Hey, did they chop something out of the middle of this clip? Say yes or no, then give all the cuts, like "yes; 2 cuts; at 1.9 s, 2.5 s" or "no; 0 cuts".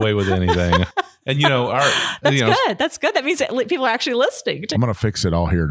yes; 1 cut; at 4.6 s